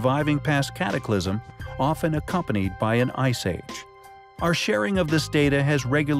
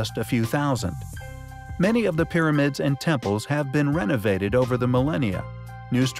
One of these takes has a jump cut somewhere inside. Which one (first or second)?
first